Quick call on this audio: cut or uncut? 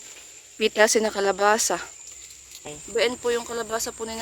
cut